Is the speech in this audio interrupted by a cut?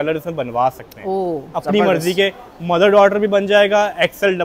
no; 0 cuts

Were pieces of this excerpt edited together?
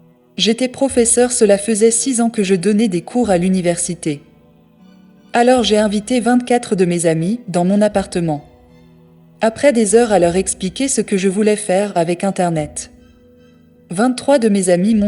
no; 0 cuts

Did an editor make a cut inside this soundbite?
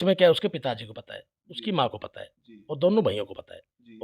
no; 0 cuts

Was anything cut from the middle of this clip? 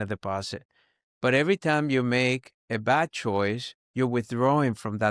no; 0 cuts

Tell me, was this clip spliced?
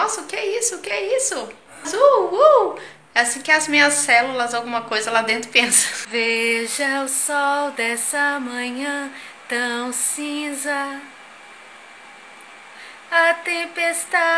yes; 2 cuts; at 1.9 s, 5.9 s

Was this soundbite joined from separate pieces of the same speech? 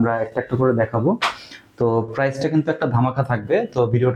no; 0 cuts

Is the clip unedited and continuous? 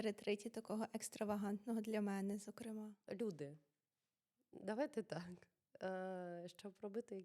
no; 1 cut; at 3.0 s

